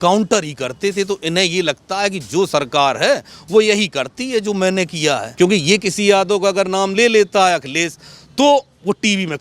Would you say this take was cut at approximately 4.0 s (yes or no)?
no